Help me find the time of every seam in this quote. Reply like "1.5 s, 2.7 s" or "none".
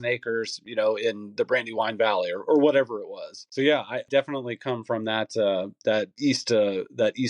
3.8 s, 6.1 s